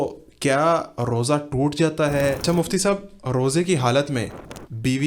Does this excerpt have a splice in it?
yes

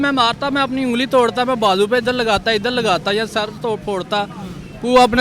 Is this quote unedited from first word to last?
yes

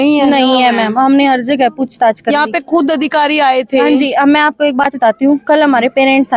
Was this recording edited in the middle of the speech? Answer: no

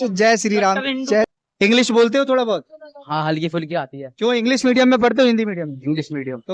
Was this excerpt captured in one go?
no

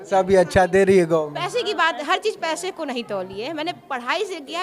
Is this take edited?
no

